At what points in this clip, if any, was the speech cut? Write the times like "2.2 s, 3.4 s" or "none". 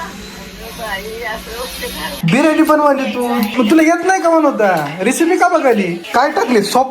2.2 s, 3.5 s, 6.0 s